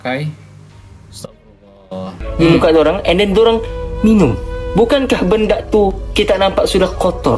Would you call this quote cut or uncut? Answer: cut